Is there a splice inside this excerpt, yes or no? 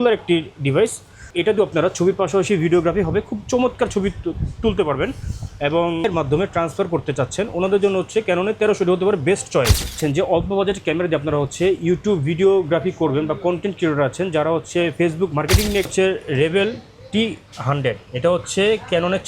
yes